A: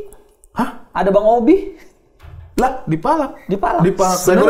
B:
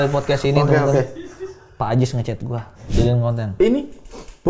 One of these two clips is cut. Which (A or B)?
B